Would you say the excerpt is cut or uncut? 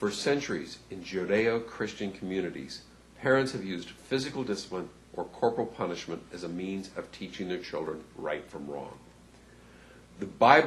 uncut